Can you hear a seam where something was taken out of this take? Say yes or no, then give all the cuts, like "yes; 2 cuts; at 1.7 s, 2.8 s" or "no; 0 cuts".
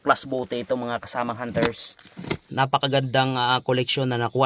yes; 1 cut; at 2.4 s